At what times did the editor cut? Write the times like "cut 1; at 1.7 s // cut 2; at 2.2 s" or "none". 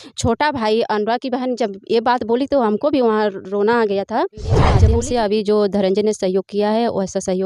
cut 1; at 4.8 s